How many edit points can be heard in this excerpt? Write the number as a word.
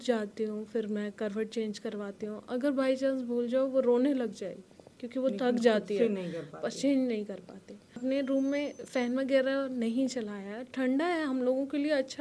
one